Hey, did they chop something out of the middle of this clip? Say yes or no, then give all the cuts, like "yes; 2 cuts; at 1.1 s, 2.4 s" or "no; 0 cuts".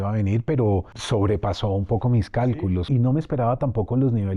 yes; 2 cuts; at 0.9 s, 2.9 s